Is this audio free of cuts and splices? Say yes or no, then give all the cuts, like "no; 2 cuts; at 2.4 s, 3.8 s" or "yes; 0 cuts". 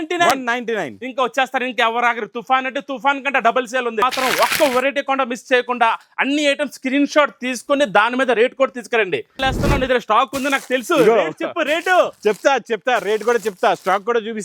no; 2 cuts; at 4.0 s, 9.4 s